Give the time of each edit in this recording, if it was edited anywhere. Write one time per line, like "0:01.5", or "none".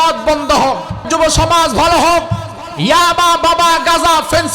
0:01.1